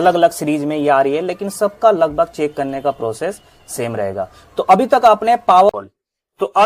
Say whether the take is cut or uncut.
cut